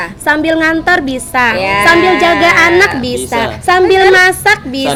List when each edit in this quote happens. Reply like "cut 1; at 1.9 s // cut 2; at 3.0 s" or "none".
none